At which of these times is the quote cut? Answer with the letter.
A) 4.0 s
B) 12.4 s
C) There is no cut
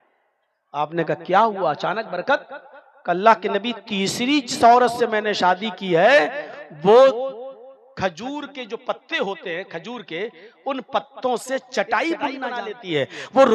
B